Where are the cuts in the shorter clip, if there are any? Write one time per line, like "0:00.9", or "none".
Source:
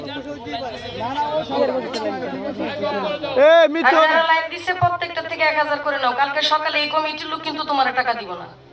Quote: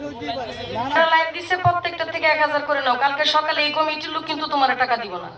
0:01.0